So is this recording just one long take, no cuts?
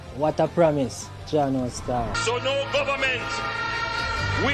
no; 1 cut; at 2.1 s

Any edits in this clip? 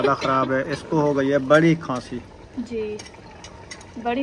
yes; 1 cut; at 2.4 s

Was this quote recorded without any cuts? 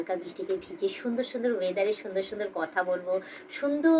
yes; 0 cuts

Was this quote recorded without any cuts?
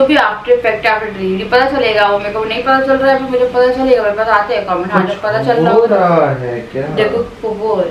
yes; 0 cuts

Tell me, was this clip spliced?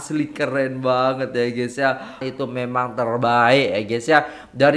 yes; 1 cut; at 2.2 s

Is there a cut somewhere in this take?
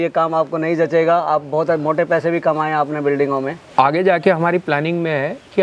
yes; 1 cut; at 3.7 s

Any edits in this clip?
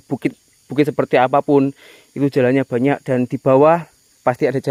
no; 0 cuts

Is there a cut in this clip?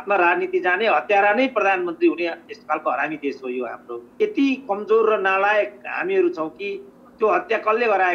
yes; 1 cut; at 4.1 s

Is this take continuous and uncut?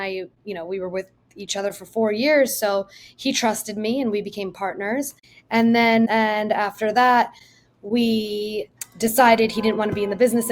no; 1 cut; at 6.1 s

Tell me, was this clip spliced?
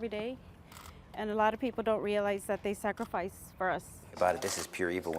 yes; 1 cut; at 4.1 s

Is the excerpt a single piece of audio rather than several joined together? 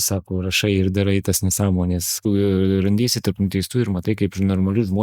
no; 1 cut; at 2.2 s

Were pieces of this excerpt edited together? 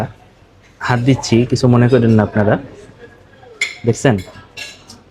no; 0 cuts

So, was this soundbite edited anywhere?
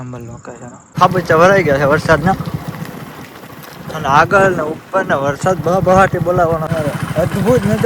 yes; 2 cuts; at 1.0 s, 6.7 s

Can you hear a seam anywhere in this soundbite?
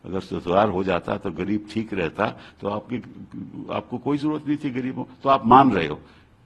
no; 0 cuts

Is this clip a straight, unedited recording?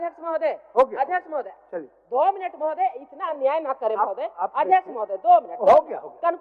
yes; 0 cuts

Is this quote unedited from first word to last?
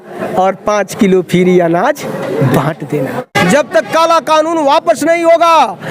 no; 1 cut; at 3.3 s

